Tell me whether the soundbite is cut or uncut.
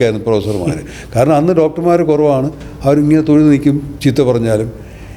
uncut